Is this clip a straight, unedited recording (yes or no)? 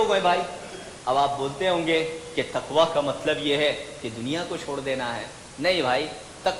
yes